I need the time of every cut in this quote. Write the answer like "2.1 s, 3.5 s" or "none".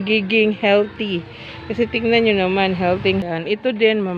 3.2 s